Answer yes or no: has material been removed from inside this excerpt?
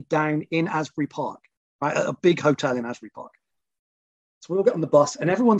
no